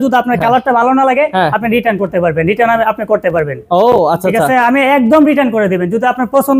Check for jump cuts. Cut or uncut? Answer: uncut